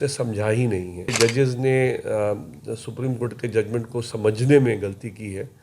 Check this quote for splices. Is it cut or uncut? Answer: cut